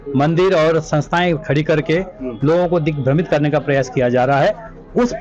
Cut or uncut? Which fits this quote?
uncut